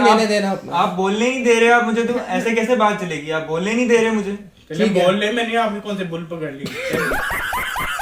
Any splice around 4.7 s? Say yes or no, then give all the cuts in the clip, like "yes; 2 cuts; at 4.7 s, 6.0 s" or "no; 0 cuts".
no; 0 cuts